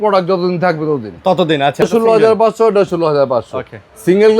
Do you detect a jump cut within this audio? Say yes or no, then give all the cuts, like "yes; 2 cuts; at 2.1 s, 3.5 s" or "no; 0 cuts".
yes; 1 cut; at 1.8 s